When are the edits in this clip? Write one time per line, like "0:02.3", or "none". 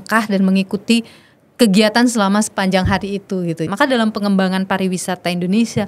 0:03.7